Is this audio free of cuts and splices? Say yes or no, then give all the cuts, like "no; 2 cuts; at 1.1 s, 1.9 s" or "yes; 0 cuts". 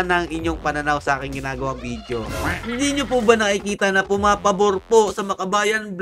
no; 1 cut; at 2.6 s